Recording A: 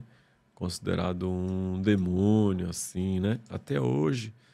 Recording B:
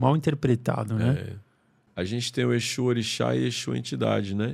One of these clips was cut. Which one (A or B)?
B